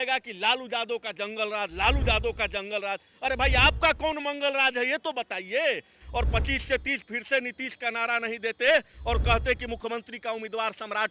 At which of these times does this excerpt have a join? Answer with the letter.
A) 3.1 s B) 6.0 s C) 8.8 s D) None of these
B